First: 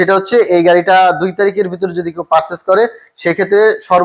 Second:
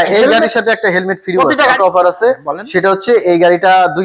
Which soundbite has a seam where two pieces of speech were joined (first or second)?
second